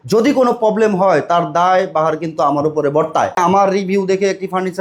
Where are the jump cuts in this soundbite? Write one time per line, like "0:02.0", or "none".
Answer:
0:03.4